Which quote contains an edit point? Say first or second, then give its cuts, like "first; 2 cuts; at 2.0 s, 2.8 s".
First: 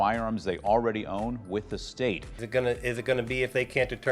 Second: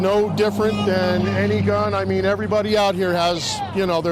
first; 1 cut; at 2.3 s